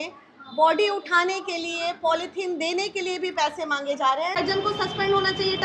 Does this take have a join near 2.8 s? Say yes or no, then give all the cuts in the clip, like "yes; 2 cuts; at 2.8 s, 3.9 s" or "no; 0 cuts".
no; 1 cut; at 4.4 s